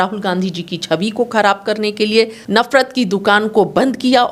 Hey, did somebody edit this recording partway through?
yes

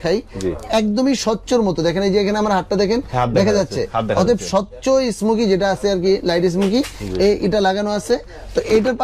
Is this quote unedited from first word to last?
yes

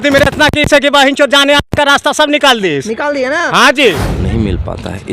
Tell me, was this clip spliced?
yes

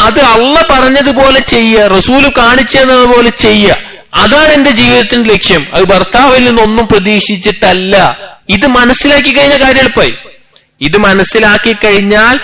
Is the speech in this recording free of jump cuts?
yes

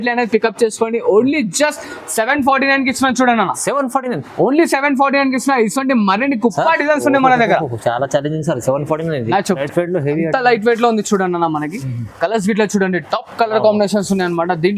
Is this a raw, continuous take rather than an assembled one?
no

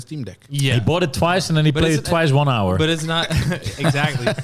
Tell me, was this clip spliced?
no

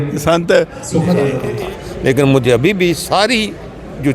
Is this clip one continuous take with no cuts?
no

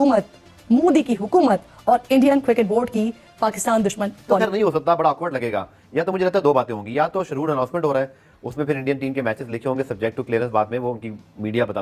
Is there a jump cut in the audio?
no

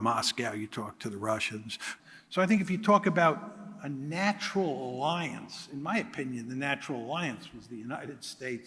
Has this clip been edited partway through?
yes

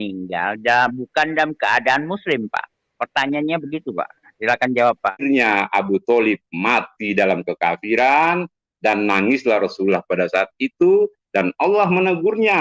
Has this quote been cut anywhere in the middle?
yes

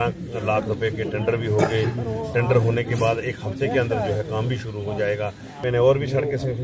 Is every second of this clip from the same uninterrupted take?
no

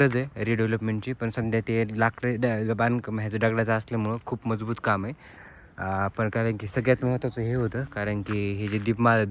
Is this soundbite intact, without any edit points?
yes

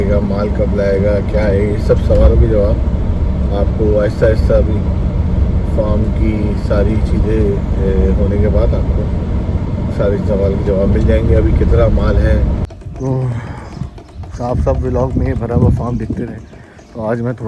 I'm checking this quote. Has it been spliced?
yes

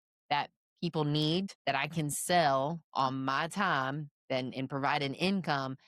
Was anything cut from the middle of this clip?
yes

